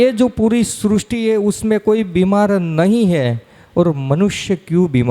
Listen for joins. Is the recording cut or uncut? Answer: uncut